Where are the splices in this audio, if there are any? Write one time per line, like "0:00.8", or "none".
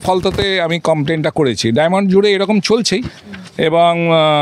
none